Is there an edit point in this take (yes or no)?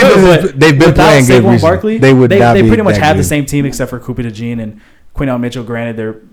no